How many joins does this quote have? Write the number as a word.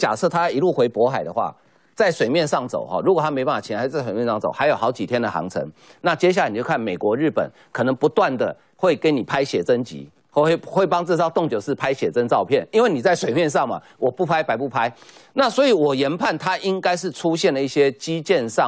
zero